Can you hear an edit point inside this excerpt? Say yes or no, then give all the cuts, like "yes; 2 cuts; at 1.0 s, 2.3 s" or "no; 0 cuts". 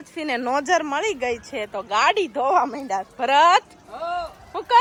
no; 0 cuts